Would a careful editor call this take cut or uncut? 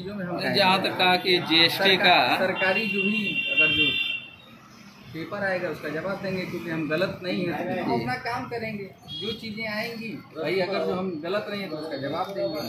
uncut